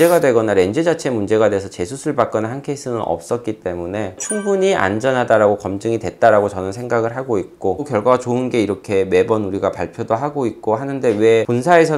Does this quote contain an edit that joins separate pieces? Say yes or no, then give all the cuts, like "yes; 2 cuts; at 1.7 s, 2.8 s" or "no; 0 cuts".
yes; 1 cut; at 7.8 s